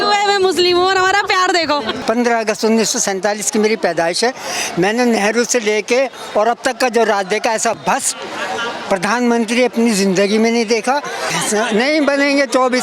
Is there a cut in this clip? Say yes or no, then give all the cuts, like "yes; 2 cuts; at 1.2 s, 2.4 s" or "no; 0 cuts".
yes; 2 cuts; at 1.9 s, 11.3 s